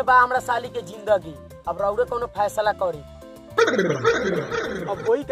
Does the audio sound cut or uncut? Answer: uncut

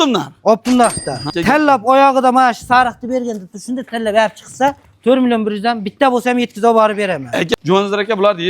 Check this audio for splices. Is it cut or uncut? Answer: cut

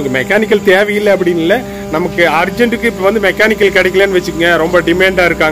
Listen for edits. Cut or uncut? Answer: uncut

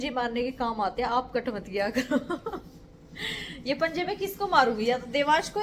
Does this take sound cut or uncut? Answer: uncut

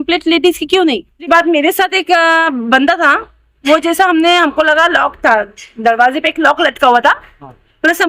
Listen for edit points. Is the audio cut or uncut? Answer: cut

